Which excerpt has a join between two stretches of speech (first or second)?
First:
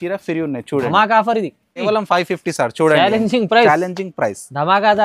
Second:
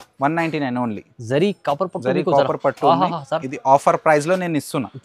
first